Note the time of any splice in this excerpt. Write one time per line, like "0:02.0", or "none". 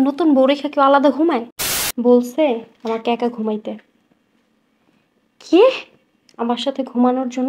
0:01.6